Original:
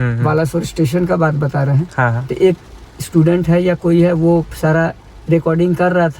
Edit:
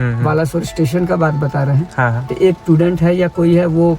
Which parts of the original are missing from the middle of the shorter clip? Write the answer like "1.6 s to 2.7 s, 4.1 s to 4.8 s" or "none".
2.6 s to 3.1 s